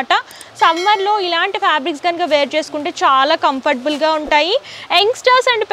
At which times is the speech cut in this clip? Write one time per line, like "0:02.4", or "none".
none

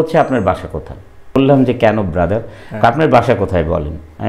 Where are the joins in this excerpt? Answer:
0:01.4

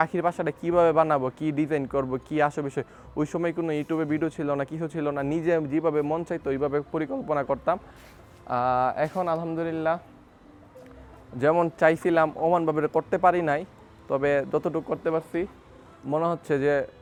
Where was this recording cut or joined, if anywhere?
none

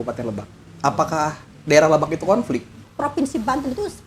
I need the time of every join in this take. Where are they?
0:02.8

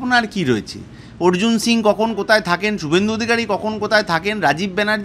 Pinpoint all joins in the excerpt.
none

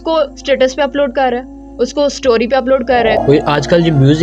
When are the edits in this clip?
0:03.2

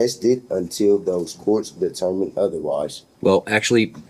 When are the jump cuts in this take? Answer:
0:03.0

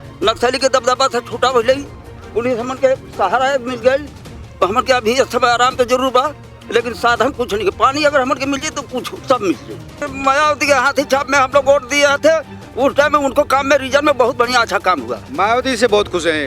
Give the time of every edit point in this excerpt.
0:10.0

